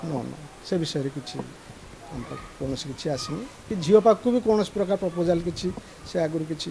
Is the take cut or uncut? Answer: uncut